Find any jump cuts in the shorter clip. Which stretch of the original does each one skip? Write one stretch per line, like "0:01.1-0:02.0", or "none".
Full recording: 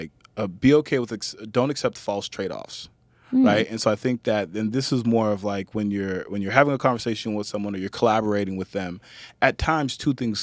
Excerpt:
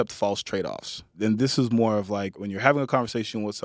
0:03.0-0:04.5
0:05.7-0:06.3